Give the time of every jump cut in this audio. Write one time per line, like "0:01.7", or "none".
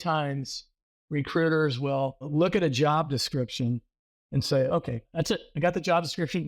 0:02.3
0:05.0